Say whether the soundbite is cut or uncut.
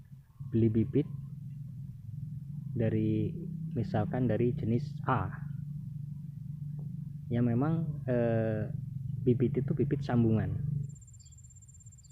cut